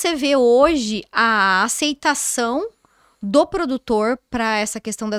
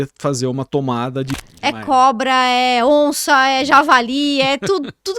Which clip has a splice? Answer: second; 1 cut; at 1.3 s

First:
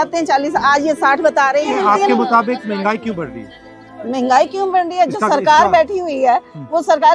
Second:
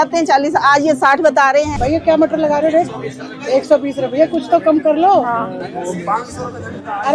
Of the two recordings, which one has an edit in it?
second; 1 cut; at 1.7 s

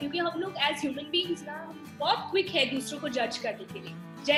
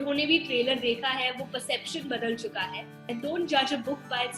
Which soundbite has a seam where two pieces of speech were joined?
second; 1 cut; at 3.0 s

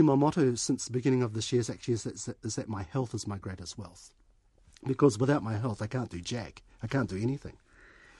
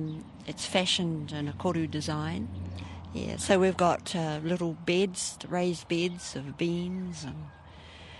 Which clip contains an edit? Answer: second; 1 cut; at 2.8 s

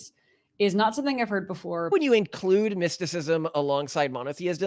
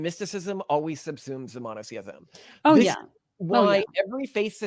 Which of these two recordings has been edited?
first; 1 cut; at 1.9 s

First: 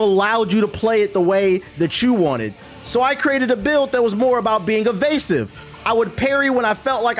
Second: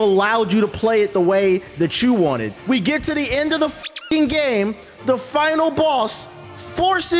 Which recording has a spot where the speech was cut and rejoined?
second; 1 cut; at 2.5 s

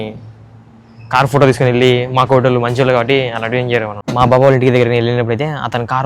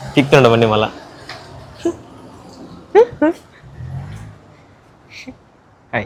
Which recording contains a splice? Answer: first; 1 cut; at 4.0 s

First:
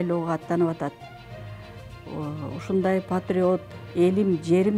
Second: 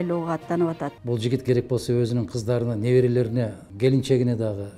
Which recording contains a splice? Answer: second; 2 cuts; at 1.0 s, 3.6 s

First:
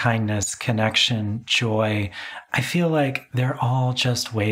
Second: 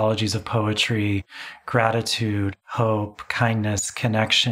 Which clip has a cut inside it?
first; 1 cut; at 3.2 s

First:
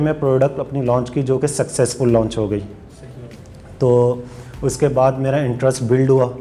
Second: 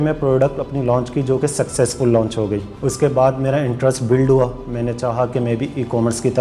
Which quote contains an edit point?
second; 1 cut; at 2.7 s

